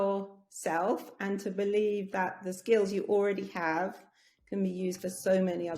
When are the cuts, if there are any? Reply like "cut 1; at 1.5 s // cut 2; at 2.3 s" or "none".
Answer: none

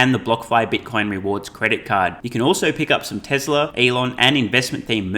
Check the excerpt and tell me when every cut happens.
cut 1; at 3.7 s

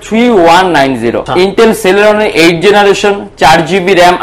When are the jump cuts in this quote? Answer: cut 1; at 1.2 s

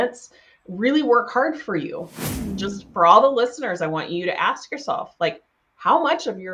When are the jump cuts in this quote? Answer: cut 1; at 2.1 s

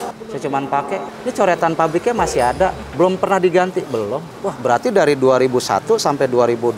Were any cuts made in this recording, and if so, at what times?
none

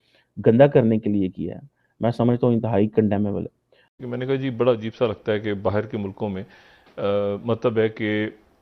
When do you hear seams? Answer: cut 1; at 3.9 s

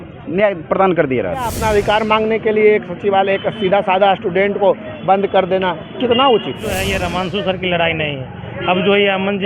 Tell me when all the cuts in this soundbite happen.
cut 1; at 1.5 s // cut 2; at 6.9 s

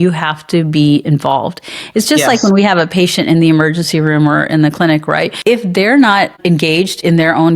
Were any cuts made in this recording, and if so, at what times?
cut 1; at 5.3 s // cut 2; at 6.4 s

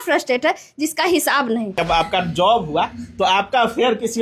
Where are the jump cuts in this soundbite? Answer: cut 1; at 1.8 s

